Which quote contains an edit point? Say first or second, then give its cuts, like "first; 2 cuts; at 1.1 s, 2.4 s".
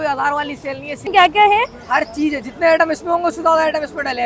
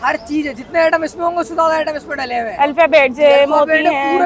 first; 1 cut; at 0.9 s